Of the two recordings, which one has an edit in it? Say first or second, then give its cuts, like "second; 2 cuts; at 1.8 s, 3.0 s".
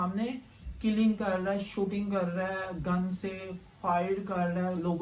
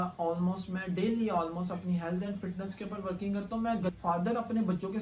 second; 1 cut; at 3.9 s